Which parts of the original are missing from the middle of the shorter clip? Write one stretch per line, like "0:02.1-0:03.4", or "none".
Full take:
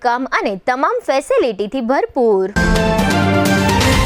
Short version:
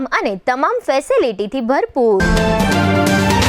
0:02.4-0:02.6